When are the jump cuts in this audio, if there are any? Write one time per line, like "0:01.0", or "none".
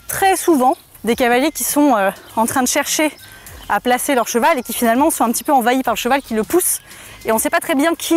0:00.9